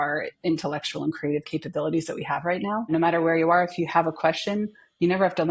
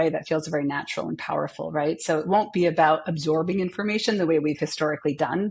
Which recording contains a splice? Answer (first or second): first